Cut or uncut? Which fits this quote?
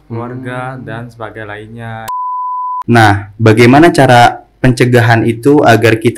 cut